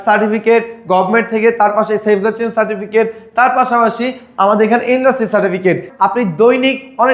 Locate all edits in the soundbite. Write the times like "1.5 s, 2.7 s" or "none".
5.9 s